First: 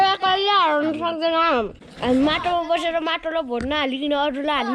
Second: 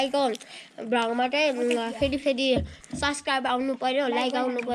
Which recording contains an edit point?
first; 1 cut; at 1.8 s

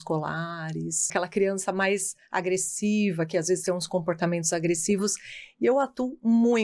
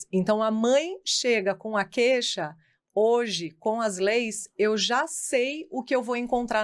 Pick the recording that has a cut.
first; 1 cut; at 1.1 s

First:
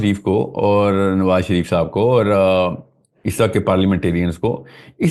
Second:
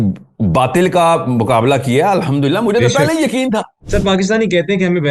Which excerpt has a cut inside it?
second; 1 cut; at 3.8 s

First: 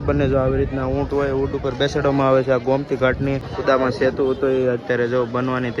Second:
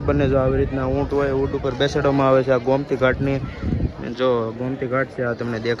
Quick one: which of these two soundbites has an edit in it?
first; 1 cut; at 3.5 s

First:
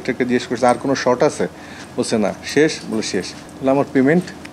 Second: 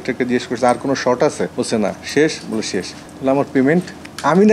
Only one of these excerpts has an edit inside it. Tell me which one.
second; 1 cut; at 1.5 s

